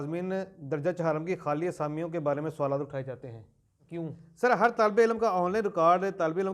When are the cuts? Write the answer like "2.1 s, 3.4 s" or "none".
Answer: 4.3 s